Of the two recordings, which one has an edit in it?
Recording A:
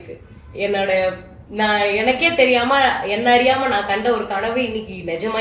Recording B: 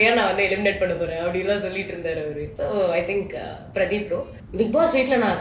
B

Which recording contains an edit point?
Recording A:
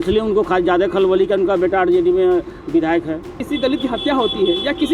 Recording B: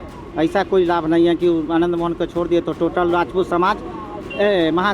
A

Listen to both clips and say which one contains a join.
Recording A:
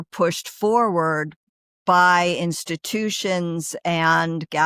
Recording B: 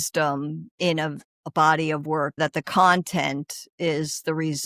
B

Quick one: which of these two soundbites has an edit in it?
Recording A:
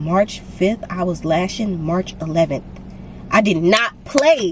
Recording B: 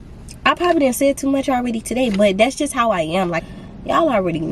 B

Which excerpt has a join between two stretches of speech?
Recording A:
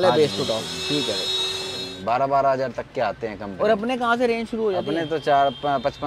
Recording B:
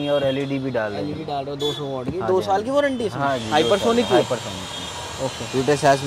A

